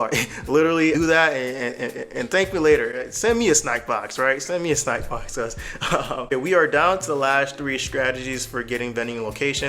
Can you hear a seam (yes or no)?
no